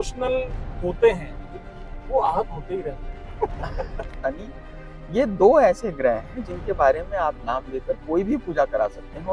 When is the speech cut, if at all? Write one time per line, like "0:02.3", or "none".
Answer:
0:04.2

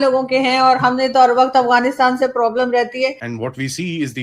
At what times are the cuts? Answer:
0:03.3

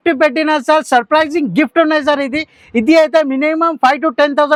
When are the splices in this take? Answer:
none

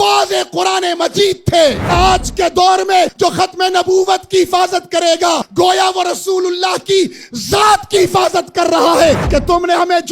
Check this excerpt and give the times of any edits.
0:01.9
0:03.1
0:05.5
0:09.2

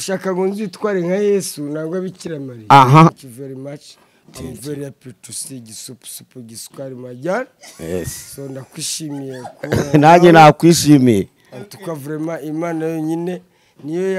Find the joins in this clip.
0:03.1

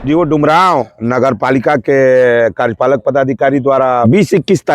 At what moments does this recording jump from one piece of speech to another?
0:00.9
0:04.0

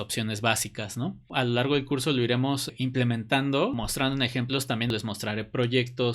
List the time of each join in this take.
0:01.3
0:03.8
0:04.9

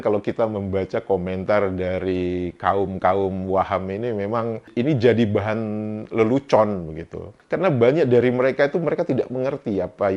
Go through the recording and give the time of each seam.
none

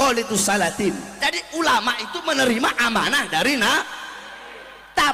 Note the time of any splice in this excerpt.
0:01.1

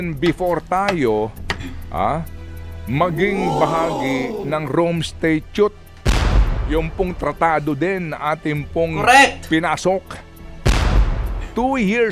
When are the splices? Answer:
none

